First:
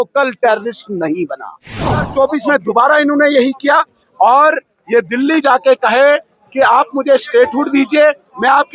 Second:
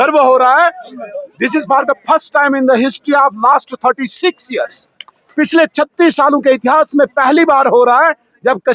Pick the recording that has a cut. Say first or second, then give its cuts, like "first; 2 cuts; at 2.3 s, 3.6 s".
first; 1 cut; at 2.1 s